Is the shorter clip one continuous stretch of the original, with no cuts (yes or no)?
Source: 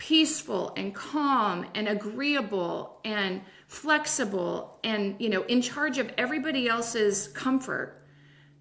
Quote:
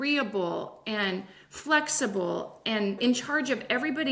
no